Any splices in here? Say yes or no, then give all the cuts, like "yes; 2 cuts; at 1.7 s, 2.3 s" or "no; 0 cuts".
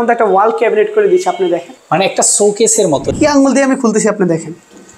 yes; 1 cut; at 3.1 s